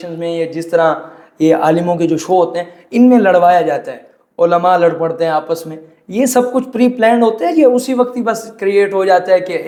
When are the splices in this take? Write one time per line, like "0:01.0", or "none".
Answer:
none